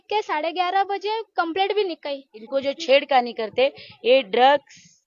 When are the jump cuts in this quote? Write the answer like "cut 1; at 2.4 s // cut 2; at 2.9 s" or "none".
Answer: cut 1; at 2.3 s